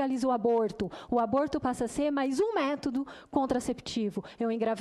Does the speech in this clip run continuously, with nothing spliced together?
yes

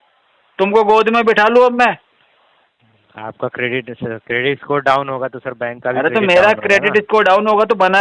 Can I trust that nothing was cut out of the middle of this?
yes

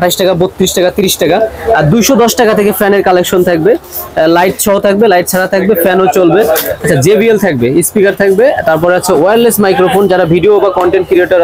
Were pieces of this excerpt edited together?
no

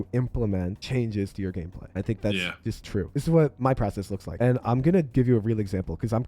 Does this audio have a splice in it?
yes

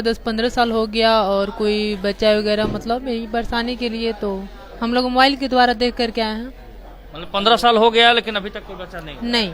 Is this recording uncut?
yes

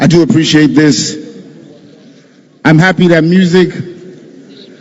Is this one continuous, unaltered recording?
yes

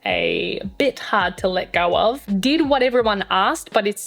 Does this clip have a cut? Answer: yes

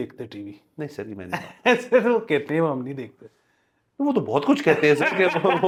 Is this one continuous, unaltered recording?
yes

